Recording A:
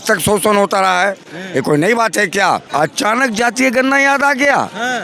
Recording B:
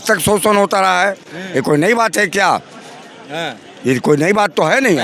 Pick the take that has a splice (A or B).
A